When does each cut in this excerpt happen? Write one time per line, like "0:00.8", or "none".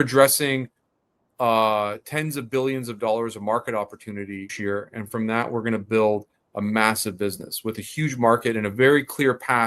0:04.5